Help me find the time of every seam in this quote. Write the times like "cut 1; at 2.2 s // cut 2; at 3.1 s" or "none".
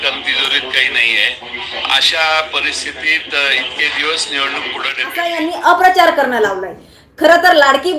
cut 1; at 5.3 s